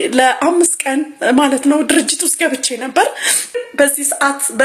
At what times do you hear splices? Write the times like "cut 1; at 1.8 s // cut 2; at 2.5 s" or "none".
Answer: cut 1; at 3.6 s